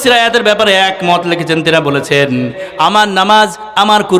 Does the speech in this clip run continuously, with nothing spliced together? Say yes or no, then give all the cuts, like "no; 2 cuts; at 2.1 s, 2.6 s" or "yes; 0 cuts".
no; 1 cut; at 2.6 s